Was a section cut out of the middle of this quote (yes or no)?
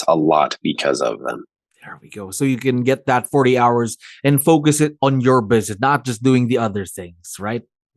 no